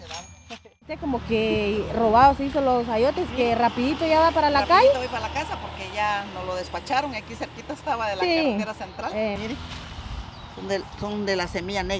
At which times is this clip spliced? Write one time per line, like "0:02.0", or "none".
0:01.0
0:09.3